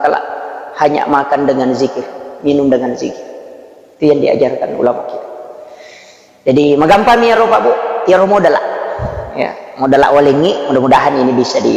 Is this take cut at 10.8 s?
no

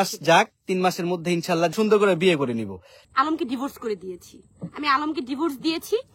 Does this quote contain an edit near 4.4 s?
no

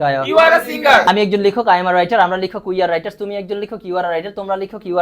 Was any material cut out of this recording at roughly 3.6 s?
no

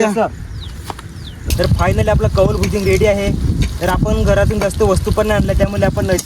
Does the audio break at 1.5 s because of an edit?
yes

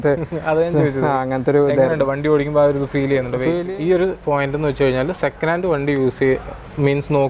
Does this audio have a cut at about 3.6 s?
yes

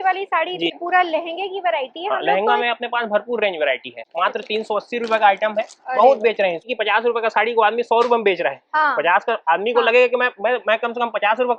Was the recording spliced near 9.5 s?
no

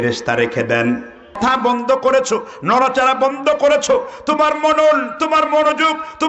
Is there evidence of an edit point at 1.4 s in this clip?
yes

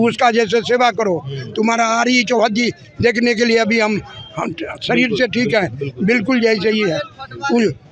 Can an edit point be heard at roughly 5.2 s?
no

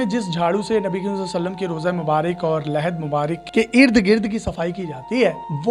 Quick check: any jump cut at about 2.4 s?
no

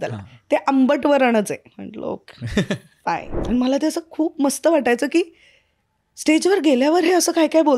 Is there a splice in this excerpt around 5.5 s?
no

